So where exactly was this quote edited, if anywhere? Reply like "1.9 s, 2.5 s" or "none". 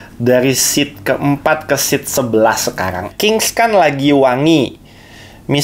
3.1 s